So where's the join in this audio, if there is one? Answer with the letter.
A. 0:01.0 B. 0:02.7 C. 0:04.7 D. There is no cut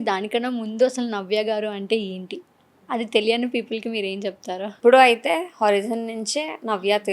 C